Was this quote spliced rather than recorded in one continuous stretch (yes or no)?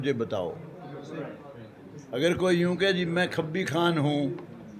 no